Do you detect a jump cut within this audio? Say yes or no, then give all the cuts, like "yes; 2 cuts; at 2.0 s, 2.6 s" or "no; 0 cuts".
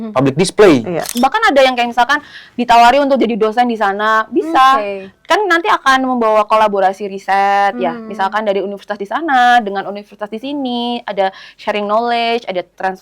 yes; 1 cut; at 1.1 s